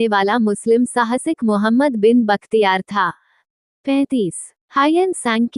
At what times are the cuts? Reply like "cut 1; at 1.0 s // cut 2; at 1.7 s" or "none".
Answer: none